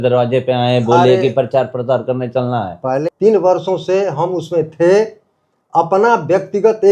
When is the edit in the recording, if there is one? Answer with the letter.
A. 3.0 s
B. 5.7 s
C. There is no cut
A